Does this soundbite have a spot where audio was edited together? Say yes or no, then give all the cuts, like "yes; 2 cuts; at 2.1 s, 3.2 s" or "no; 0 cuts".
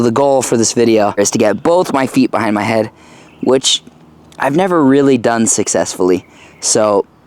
yes; 1 cut; at 1.2 s